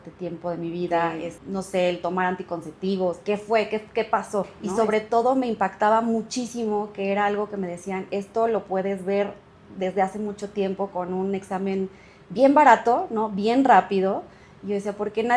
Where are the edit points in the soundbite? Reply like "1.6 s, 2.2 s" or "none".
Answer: none